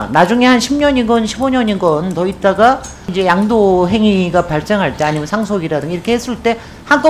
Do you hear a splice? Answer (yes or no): yes